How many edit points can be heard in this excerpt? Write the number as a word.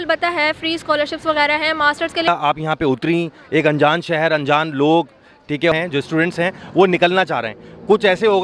two